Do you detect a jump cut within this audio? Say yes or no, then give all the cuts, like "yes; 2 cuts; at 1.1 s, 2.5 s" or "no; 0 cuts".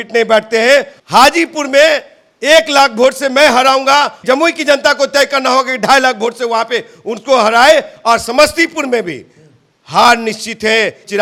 no; 0 cuts